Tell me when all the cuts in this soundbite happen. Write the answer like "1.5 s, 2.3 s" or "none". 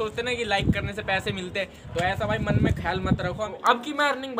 3.4 s

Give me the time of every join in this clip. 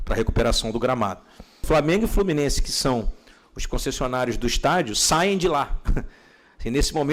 1.6 s

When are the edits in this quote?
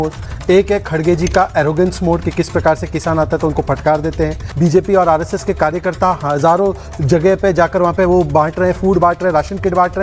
4.5 s

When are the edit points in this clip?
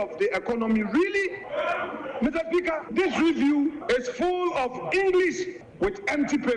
1.4 s, 2.8 s, 3.8 s, 5.6 s

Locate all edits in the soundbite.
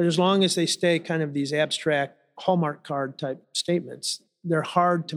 none

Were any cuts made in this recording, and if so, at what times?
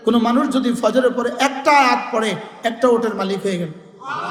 none

